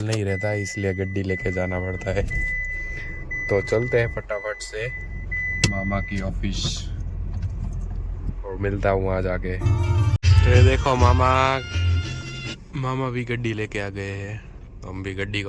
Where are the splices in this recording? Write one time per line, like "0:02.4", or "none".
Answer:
none